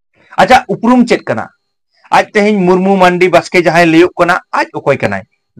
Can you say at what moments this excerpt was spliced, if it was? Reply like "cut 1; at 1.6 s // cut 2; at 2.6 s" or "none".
none